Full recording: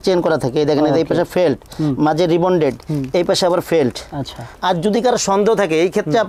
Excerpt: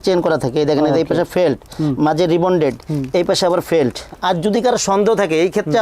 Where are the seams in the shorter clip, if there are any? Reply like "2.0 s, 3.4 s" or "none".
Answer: 4.1 s

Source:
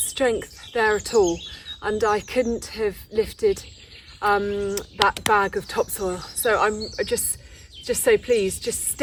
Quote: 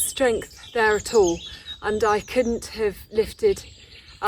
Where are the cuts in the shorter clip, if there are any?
none

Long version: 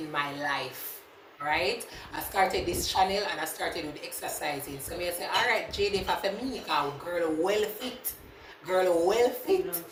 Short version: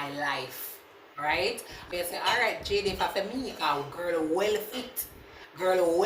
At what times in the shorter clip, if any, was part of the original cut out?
1.9 s

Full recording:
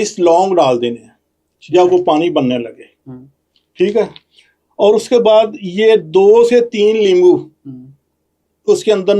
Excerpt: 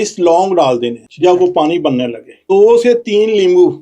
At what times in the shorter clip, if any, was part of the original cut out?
1.0 s, 2.4 s

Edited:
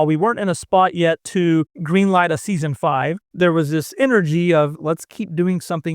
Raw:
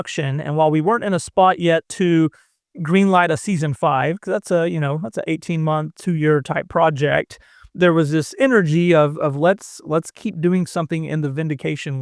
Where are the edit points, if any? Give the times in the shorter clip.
1.8 s, 3.2 s, 4.7 s

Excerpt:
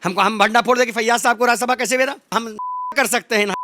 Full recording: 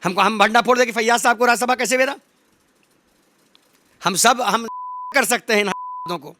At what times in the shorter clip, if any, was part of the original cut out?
2.3 s

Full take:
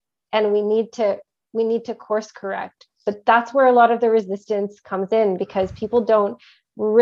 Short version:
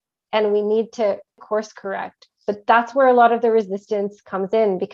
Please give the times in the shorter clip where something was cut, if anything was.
1.4 s

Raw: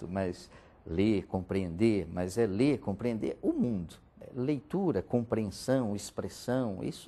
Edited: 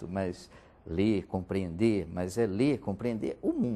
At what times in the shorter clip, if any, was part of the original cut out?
none

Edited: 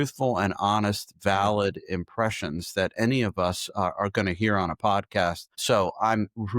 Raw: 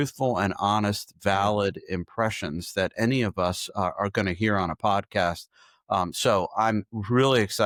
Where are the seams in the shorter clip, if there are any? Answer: 5.6 s

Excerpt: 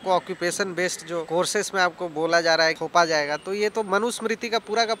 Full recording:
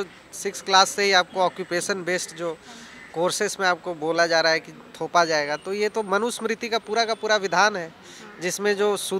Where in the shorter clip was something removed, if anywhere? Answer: 1.3 s, 2.8 s

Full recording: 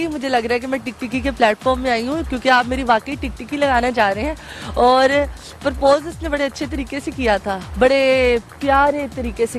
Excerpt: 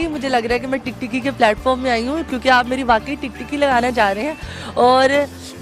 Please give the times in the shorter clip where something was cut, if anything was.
none

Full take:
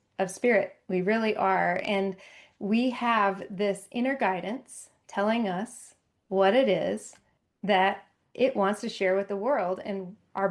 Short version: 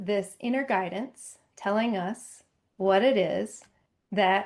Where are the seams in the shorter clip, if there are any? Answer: none

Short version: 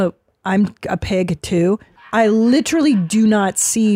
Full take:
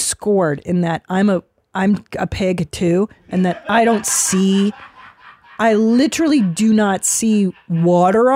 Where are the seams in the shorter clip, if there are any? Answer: 1.9 s

